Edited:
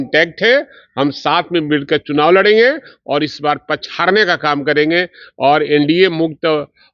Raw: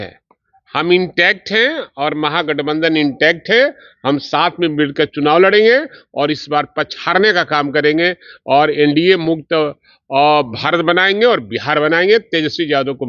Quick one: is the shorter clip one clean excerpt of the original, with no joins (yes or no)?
yes